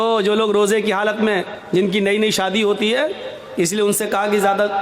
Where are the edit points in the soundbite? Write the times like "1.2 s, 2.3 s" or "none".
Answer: 1.5 s